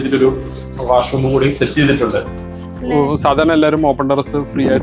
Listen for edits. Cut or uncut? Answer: cut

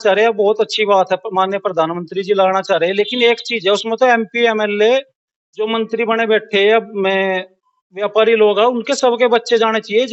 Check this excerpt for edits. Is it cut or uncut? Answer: uncut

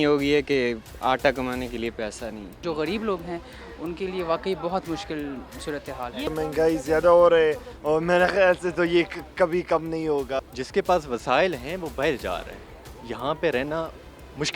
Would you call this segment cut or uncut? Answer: cut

